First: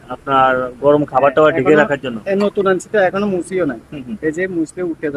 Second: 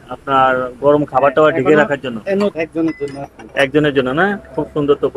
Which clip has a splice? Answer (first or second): second